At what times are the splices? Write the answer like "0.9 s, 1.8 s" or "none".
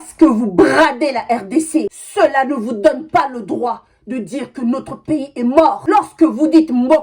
1.9 s